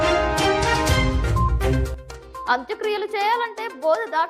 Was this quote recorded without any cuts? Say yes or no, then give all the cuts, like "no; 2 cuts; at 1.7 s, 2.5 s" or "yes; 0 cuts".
yes; 0 cuts